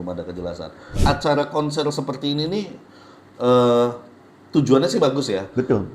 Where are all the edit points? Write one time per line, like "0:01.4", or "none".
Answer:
0:01.0